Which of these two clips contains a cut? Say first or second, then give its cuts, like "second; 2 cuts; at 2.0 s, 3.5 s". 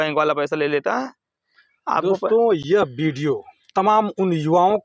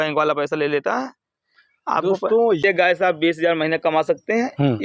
second; 1 cut; at 2.6 s